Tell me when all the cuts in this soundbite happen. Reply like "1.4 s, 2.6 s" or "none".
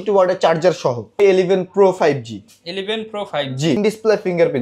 1.1 s, 3.8 s